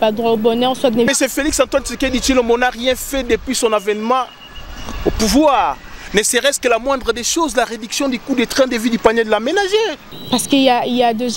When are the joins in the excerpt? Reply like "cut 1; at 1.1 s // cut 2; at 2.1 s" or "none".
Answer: cut 1; at 1.1 s // cut 2; at 10.0 s